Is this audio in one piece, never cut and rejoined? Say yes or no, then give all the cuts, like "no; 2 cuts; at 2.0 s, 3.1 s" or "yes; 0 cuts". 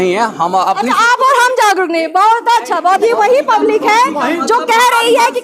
no; 1 cut; at 3.0 s